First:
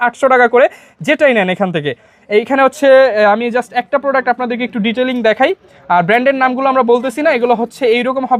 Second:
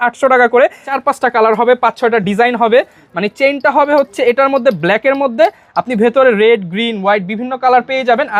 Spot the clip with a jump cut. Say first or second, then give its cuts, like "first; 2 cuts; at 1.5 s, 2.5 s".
second; 1 cut; at 0.9 s